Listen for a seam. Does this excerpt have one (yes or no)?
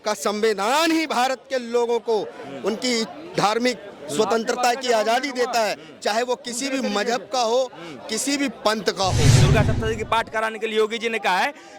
yes